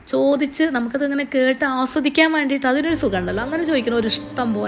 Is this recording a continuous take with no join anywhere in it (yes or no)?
yes